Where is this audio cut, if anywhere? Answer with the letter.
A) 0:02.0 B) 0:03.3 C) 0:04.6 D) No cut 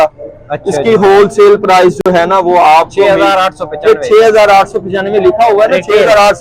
D